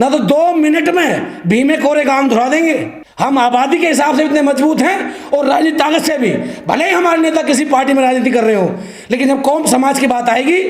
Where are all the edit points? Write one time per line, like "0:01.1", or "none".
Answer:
0:03.0